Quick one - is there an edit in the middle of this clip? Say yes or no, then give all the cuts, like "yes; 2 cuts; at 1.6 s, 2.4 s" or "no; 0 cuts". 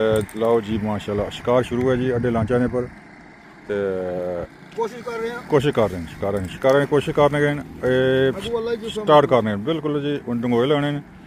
no; 0 cuts